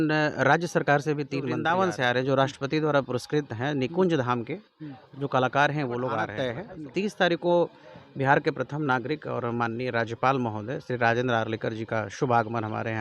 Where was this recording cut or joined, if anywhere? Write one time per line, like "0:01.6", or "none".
0:01.5
0:06.7